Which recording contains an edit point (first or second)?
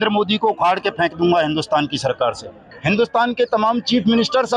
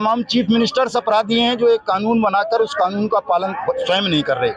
first